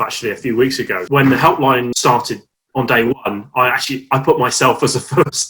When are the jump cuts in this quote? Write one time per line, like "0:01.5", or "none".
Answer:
0:01.0
0:01.9